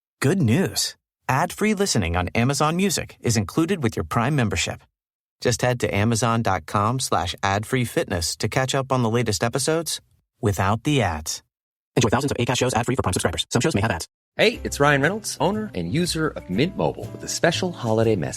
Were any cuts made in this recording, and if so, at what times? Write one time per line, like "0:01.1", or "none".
0:14.2